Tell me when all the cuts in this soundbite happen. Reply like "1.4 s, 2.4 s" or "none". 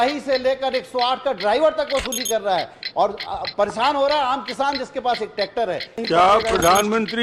6.1 s